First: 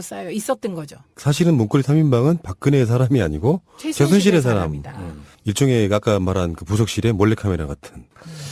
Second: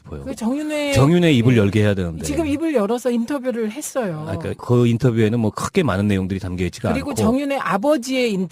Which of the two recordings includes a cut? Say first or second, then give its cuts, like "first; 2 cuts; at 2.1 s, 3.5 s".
first; 1 cut; at 3.8 s